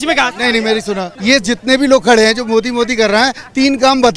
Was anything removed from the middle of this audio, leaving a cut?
yes; 1 cut; at 1.1 s

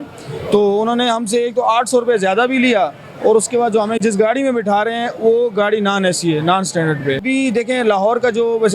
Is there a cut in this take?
yes; 1 cut; at 7.2 s

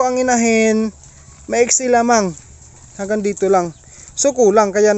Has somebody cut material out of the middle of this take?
no; 0 cuts

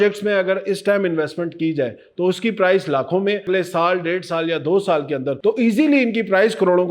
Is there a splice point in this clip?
yes; 1 cut; at 3.4 s

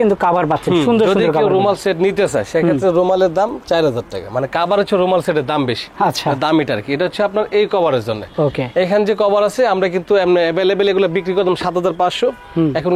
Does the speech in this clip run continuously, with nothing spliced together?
yes; 0 cuts

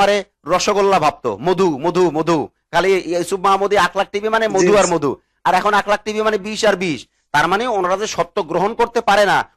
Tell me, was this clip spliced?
no; 0 cuts

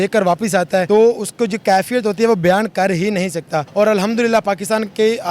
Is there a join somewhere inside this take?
yes; 2 cuts; at 0.9 s, 3.6 s

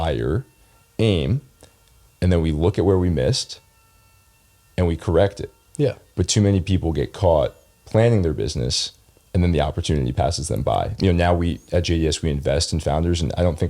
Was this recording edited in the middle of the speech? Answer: yes; 1 cut; at 10.9 s

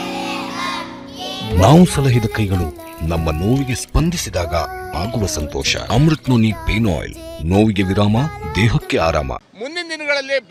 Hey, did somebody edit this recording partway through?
no; 0 cuts

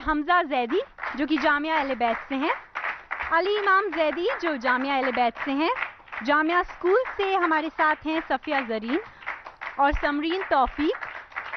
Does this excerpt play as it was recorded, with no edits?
no; 1 cut; at 8.0 s

